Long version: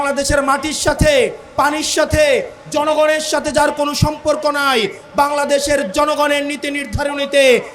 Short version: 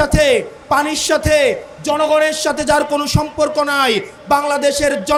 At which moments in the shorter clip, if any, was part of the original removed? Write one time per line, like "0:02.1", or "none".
none